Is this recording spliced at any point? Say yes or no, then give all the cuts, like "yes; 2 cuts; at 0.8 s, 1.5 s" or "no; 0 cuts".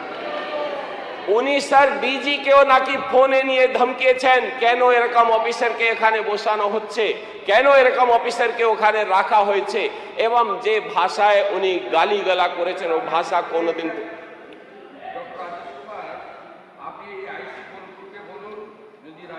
no; 0 cuts